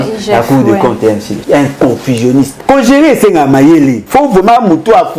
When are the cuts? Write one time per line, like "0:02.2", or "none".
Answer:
0:01.3
0:02.6
0:04.0